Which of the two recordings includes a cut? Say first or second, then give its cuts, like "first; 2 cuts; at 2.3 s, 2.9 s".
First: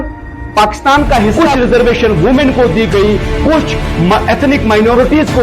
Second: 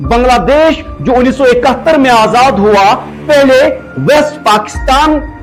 first; 1 cut; at 1.3 s